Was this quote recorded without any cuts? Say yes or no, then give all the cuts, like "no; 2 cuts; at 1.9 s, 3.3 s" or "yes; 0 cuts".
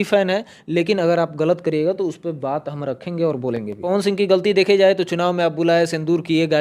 no; 1 cut; at 3.9 s